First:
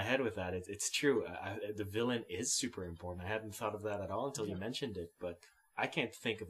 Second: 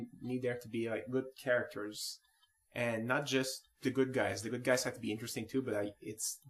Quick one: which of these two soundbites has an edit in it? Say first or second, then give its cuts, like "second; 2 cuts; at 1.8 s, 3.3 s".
second; 1 cut; at 4.2 s